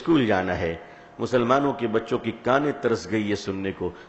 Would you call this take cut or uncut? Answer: uncut